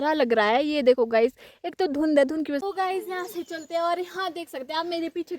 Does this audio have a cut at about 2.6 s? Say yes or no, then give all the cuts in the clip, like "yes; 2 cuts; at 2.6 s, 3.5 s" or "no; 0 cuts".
yes; 1 cut; at 2.6 s